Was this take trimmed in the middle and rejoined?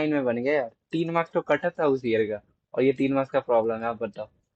no; 0 cuts

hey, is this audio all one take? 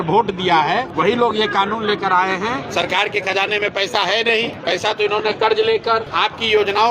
no; 4 cuts; at 0.9 s, 2.6 s, 4.6 s, 6.1 s

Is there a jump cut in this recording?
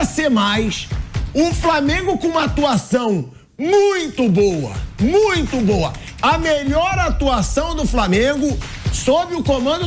no; 0 cuts

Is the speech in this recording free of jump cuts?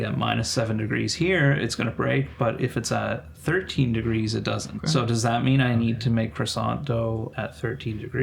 no; 2 cuts; at 4.8 s, 7.3 s

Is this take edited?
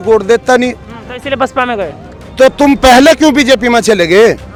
no; 0 cuts

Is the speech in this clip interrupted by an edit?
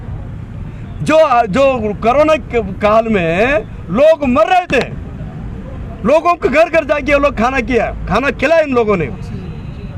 no; 0 cuts

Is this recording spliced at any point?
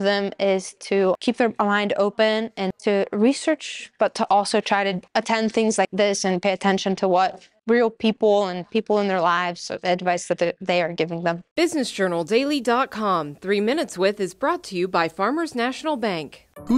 yes; 6 cuts; at 1.2 s, 2.7 s, 5.0 s, 5.9 s, 7.5 s, 11.4 s

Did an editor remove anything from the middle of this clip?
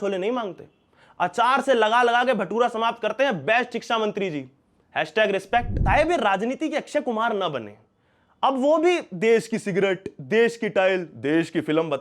yes; 1 cut; at 5.7 s

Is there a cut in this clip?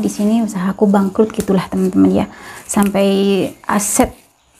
no; 0 cuts

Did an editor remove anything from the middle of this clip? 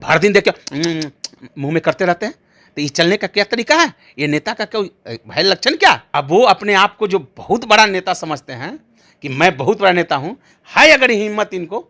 yes; 1 cut; at 6.0 s

